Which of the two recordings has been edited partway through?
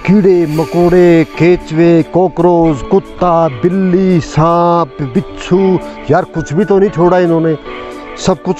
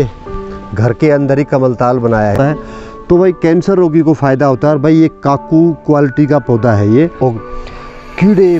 second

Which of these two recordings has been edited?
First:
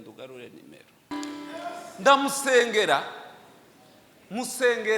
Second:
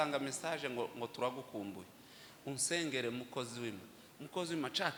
first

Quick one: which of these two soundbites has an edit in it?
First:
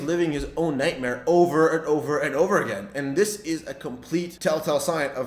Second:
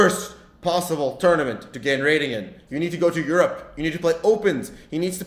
first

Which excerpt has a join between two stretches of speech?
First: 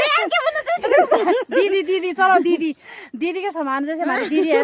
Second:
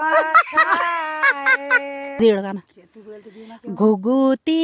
second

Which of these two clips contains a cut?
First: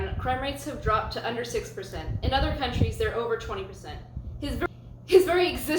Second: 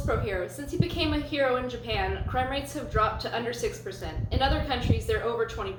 first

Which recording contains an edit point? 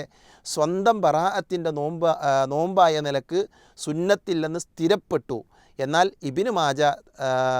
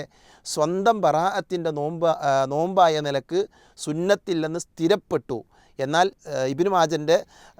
second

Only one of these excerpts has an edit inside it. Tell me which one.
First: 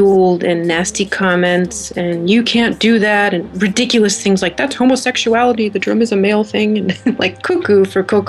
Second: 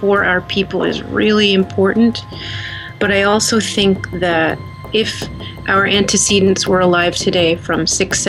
second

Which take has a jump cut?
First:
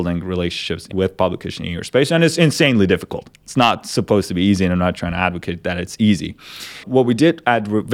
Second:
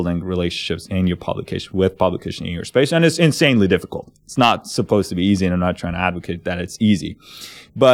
first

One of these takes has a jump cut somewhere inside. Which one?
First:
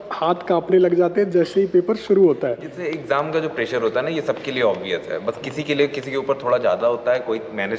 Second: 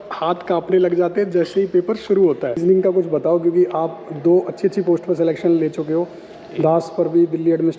second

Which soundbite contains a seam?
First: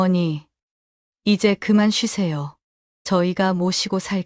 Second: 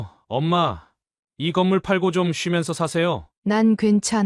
second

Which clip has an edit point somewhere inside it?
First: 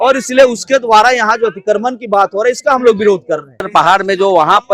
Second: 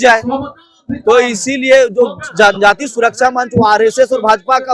first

